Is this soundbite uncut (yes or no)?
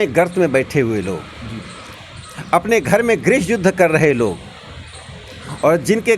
yes